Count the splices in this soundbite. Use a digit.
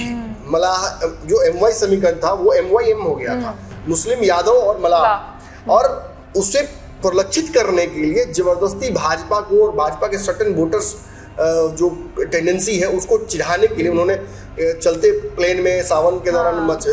0